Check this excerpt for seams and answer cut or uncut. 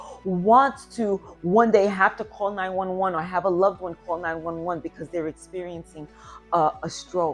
uncut